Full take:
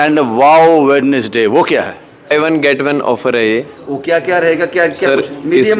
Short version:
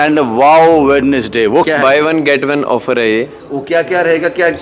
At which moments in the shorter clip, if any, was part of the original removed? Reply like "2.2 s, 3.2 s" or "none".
1.7 s